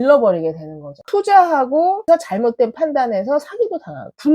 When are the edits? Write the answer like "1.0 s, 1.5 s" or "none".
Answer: 1.0 s